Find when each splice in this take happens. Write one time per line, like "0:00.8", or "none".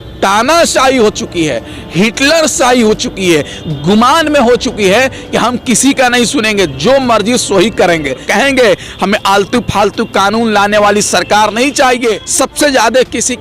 0:08.2
0:12.2